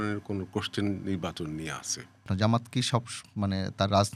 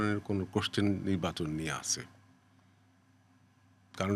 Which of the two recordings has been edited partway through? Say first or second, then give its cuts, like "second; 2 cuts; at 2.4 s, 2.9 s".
first; 1 cut; at 2.2 s